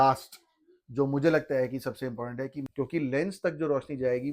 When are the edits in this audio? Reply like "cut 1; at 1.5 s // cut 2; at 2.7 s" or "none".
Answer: cut 1; at 2.6 s